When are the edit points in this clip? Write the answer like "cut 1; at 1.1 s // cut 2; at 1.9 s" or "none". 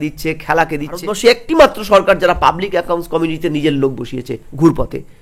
cut 1; at 1.0 s